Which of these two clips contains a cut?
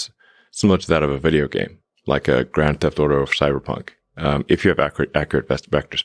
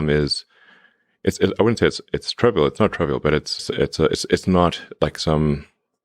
second; 1 cut; at 3.6 s

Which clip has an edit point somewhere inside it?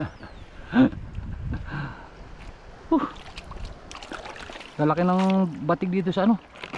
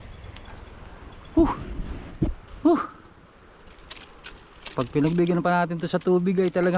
second; 1 cut; at 2.4 s

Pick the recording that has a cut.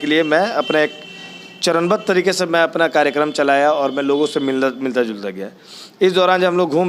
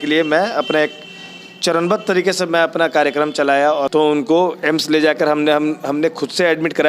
second; 1 cut; at 3.9 s

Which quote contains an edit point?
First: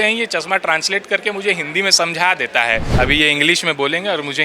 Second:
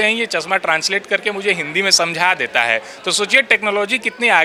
first; 1 cut; at 2.9 s

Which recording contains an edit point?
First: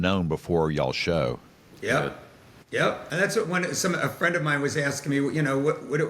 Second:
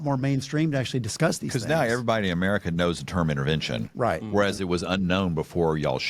first; 1 cut; at 3.0 s

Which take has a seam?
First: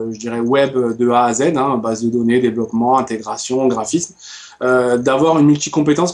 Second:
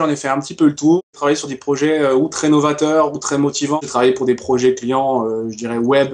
second; 2 cuts; at 1.0 s, 3.8 s

